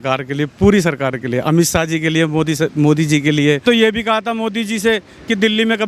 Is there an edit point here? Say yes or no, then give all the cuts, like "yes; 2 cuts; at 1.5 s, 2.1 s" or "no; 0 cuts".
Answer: yes; 1 cut; at 3.6 s